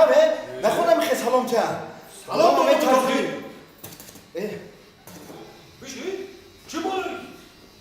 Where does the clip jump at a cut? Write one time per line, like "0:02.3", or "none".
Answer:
0:05.4